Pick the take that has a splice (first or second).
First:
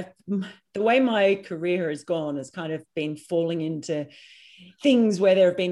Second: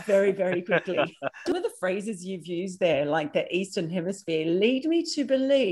second